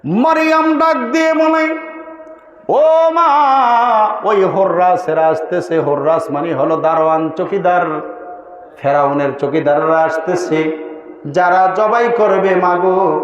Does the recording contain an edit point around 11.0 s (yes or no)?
no